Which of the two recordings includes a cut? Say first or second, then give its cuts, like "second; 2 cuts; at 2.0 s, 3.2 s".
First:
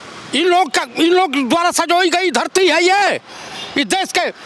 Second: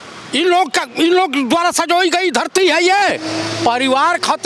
second; 1 cut; at 3.2 s